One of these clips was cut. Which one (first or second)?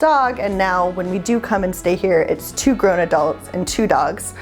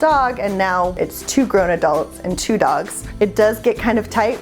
second